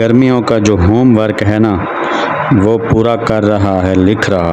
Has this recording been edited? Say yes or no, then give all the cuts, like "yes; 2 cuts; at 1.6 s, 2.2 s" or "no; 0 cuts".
no; 0 cuts